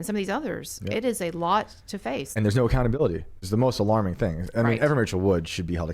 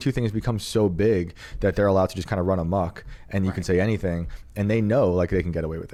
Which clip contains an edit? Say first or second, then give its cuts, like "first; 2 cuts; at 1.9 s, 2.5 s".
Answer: first; 2 cuts; at 2.3 s, 3.4 s